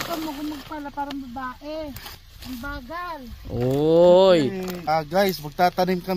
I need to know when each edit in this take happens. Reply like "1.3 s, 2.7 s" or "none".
2.2 s, 4.7 s

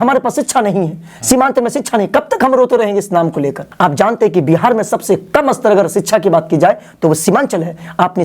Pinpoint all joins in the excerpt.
3.6 s

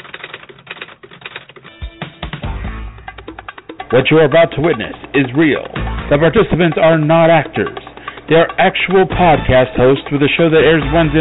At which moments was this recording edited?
1.0 s

